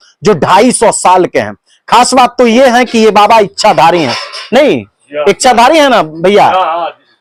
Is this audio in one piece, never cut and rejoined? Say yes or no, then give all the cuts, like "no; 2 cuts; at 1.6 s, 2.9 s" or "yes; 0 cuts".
yes; 0 cuts